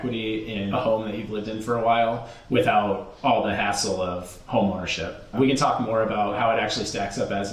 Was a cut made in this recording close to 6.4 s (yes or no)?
yes